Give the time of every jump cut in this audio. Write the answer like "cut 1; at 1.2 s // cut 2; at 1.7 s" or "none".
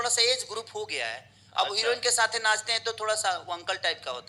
none